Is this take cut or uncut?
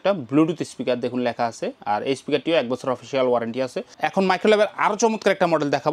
cut